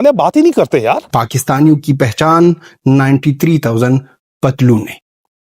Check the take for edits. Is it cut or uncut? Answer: cut